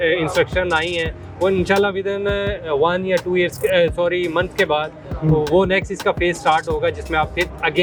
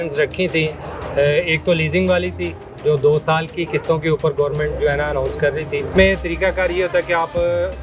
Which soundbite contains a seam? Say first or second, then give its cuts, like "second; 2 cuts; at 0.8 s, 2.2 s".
second; 1 cut; at 5.9 s